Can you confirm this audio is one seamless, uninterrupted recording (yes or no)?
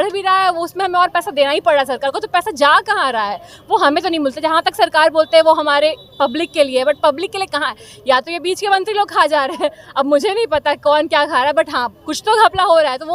yes